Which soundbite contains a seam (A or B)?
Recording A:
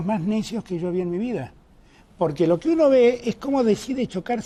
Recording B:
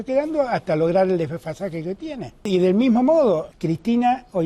B